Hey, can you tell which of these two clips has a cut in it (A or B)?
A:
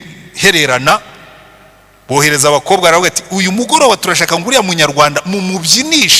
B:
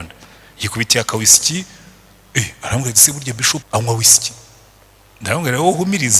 B